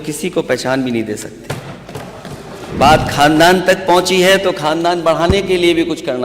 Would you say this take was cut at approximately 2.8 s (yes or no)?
yes